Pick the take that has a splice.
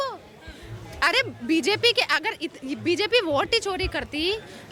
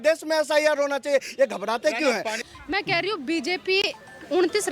second; 1 cut; at 2.4 s

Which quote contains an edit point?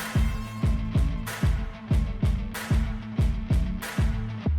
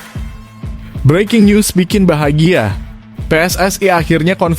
second; 1 cut; at 1.0 s

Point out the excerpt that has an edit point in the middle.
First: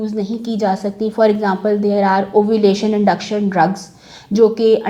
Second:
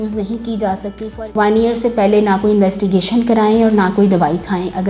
second; 1 cut; at 1.1 s

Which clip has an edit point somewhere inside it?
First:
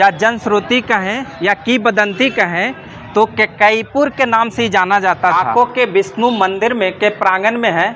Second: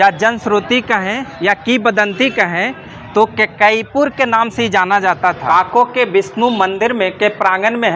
first; 1 cut; at 5.3 s

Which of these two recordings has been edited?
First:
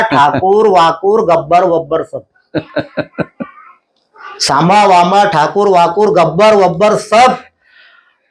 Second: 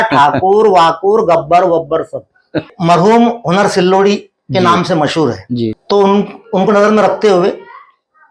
second; 2 cuts; at 2.7 s, 5.8 s

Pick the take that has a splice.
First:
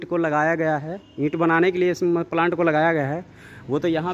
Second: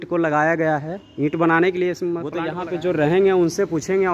second; 1 cut; at 2.3 s

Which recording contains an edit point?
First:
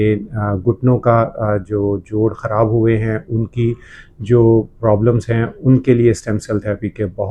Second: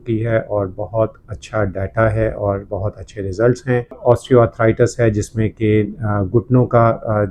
second; 1 cut; at 4.0 s

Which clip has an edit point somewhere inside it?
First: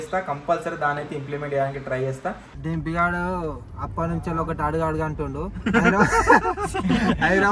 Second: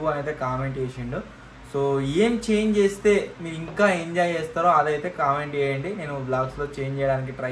first; 1 cut; at 2.5 s

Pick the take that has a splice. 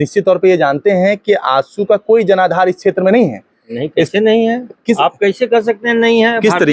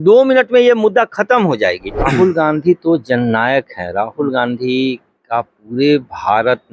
second; 1 cut; at 2.0 s

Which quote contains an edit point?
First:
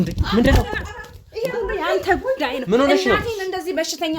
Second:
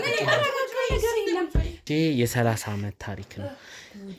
second; 1 cut; at 1.8 s

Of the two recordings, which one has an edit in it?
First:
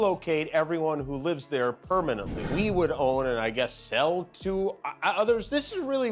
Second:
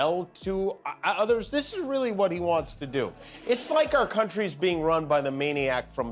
first; 1 cut; at 2.4 s

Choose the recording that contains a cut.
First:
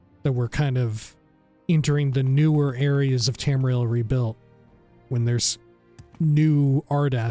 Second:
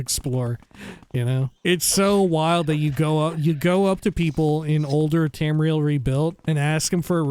second; 2 cuts; at 1.6 s, 6.4 s

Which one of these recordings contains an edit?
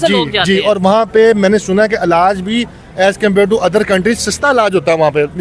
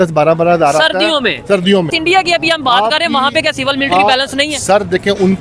second; 1 cut; at 1.9 s

